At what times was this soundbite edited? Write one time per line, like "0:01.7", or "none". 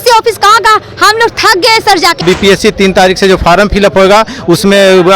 0:02.2